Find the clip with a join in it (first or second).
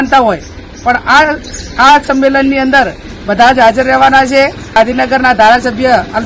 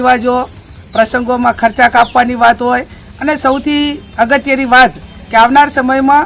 first